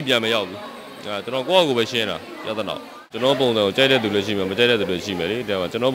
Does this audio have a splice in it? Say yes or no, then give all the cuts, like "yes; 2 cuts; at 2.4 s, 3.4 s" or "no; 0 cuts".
yes; 1 cut; at 3.1 s